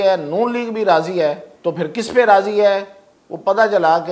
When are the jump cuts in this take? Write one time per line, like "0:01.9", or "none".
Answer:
0:01.5